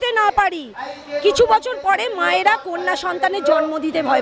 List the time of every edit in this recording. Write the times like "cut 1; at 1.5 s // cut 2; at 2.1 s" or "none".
none